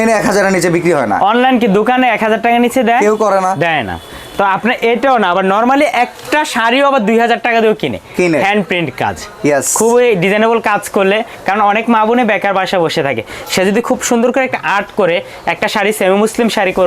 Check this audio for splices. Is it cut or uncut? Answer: uncut